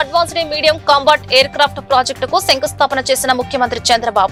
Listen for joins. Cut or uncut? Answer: uncut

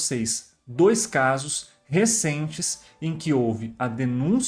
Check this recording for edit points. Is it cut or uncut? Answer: uncut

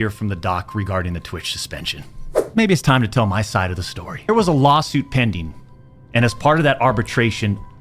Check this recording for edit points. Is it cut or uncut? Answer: cut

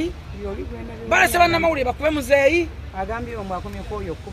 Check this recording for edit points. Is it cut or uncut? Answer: uncut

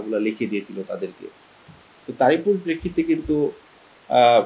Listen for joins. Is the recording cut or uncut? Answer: uncut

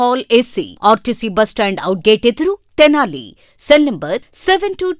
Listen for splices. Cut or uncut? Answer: uncut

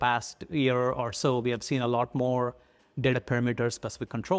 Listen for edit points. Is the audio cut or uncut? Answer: uncut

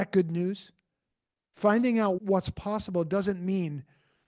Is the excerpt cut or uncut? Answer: cut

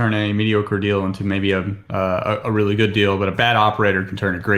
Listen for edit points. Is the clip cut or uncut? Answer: uncut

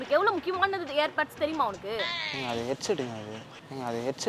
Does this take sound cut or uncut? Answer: uncut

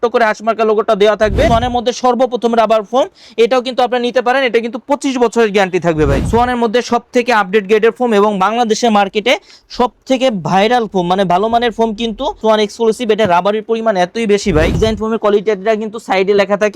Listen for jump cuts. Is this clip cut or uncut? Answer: cut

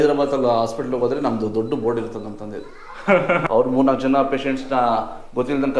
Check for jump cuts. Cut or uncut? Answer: cut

